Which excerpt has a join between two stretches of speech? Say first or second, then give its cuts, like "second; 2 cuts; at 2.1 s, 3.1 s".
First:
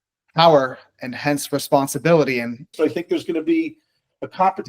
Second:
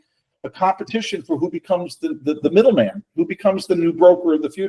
first; 1 cut; at 2.7 s